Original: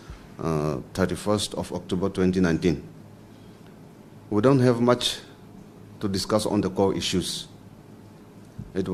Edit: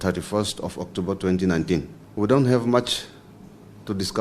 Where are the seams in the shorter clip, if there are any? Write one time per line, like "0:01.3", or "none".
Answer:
0:02.0